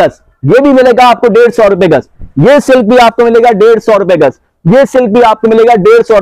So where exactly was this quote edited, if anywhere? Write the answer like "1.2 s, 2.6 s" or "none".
none